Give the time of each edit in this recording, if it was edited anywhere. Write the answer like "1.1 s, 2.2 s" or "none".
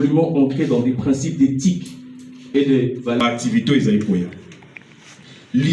3.2 s